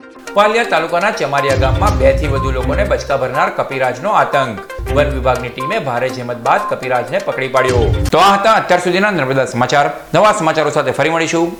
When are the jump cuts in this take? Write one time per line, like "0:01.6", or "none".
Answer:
none